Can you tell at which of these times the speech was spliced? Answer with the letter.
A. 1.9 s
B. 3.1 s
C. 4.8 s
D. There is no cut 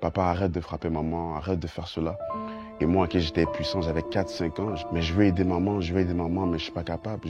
C